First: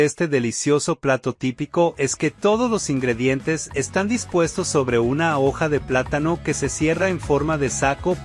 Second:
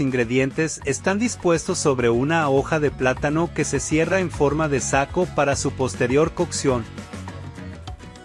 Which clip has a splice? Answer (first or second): second